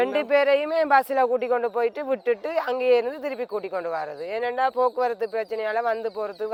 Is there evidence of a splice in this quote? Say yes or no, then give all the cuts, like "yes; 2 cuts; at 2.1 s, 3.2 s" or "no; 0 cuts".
no; 0 cuts